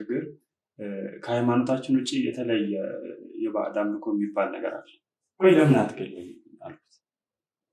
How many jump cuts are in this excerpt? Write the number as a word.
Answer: one